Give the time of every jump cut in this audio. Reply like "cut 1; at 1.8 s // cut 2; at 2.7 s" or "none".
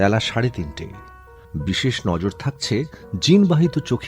cut 1; at 1.2 s